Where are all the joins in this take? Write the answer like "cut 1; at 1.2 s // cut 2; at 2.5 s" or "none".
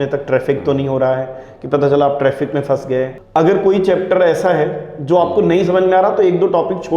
cut 1; at 3.2 s